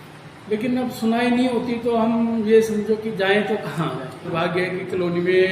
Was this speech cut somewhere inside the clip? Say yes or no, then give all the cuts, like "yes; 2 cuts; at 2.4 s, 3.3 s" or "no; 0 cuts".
yes; 1 cut; at 4.2 s